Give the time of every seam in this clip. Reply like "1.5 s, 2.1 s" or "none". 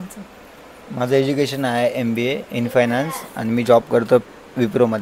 none

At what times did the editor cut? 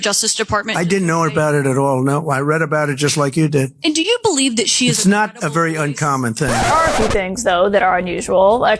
6.7 s

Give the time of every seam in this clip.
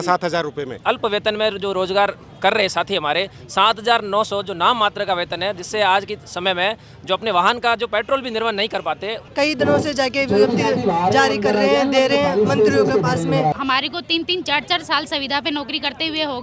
0.8 s, 9.2 s, 13.6 s

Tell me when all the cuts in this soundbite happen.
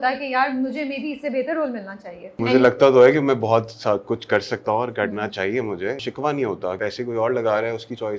2.4 s, 6.0 s, 6.8 s

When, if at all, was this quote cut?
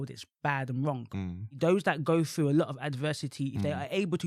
1.4 s

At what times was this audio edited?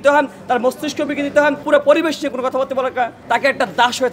1.6 s, 3.2 s

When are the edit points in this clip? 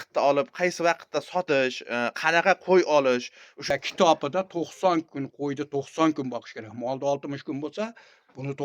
3.6 s

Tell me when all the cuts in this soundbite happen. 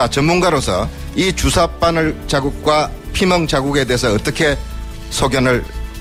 none

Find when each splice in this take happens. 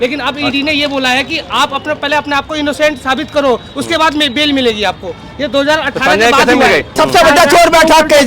7.0 s

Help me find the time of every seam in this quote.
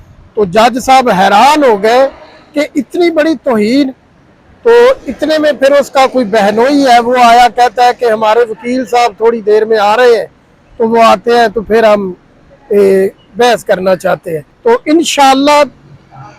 none

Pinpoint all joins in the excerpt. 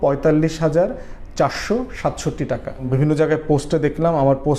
2.9 s

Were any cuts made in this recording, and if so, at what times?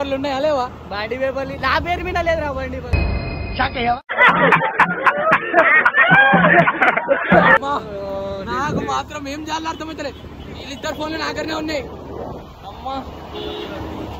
none

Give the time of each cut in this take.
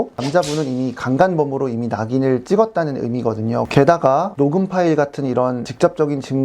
3.7 s

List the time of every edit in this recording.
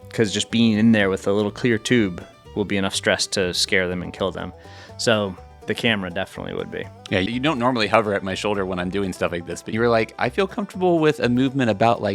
7.3 s, 9.7 s

